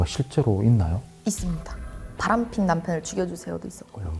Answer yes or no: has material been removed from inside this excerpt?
yes